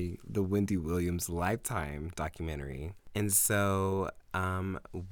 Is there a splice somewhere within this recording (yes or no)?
yes